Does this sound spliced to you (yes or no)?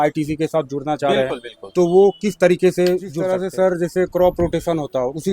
yes